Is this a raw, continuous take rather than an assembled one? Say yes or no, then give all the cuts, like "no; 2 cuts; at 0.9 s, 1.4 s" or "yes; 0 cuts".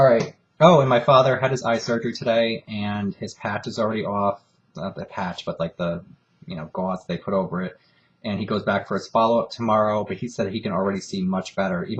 no; 1 cut; at 5.1 s